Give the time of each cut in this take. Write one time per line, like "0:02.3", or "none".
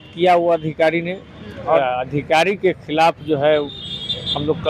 0:01.8